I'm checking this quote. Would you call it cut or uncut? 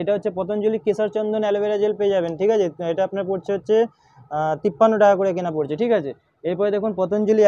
uncut